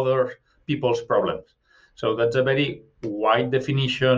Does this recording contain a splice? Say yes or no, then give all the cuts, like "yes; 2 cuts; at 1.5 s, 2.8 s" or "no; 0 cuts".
no; 0 cuts